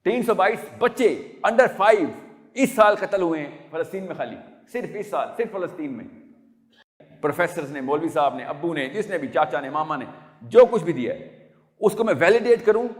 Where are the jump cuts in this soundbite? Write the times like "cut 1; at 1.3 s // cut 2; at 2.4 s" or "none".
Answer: cut 1; at 7.0 s